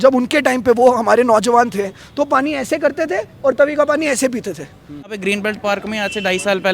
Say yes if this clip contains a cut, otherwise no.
yes